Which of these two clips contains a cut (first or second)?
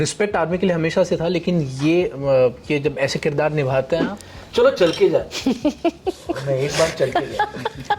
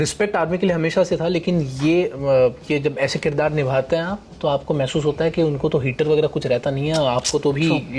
first